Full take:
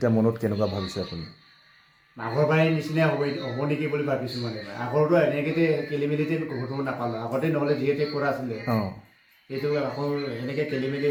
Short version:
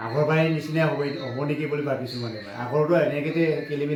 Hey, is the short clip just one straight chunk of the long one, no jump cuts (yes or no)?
yes